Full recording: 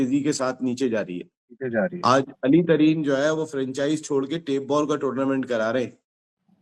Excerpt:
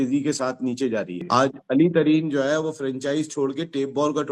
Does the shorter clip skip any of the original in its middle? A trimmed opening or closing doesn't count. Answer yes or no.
yes